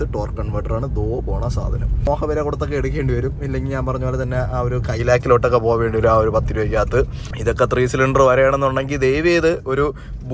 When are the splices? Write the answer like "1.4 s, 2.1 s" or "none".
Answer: 2.1 s, 7.2 s

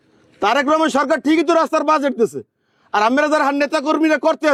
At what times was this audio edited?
none

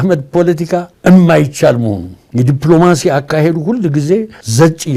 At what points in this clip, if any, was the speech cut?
none

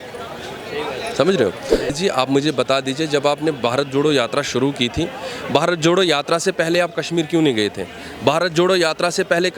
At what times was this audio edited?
1.9 s

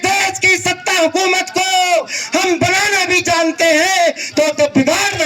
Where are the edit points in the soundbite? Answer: none

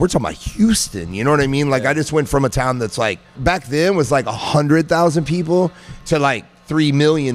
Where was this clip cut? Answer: 3.4 s, 5.9 s

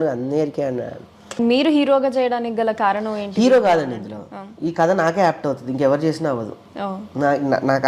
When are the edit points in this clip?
1.4 s

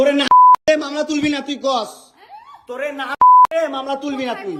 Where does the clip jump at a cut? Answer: none

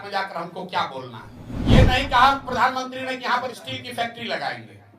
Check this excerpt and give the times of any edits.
1.8 s

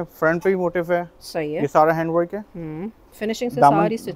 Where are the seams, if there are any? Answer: none

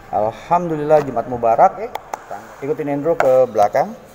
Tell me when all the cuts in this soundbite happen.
2.1 s

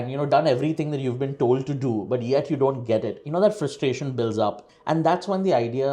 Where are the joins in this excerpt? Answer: none

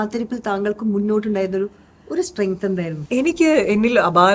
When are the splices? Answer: 3.0 s

